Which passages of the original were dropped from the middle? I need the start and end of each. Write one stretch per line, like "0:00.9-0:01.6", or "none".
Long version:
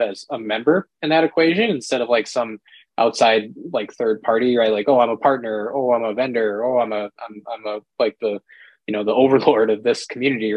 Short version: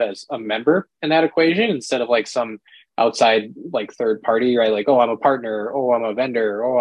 none